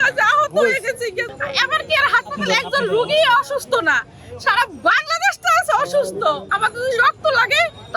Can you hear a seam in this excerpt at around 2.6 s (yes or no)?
no